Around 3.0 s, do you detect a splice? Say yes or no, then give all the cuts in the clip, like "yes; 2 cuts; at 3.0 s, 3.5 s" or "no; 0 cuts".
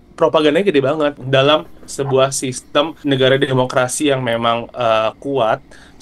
yes; 2 cuts; at 1.2 s, 3.0 s